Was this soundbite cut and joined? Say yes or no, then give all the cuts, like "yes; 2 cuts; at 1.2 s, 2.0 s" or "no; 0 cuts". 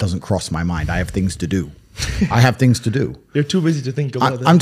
no; 0 cuts